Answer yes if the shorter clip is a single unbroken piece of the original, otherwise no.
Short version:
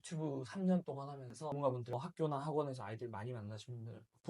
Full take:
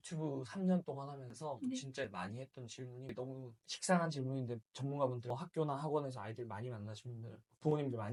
no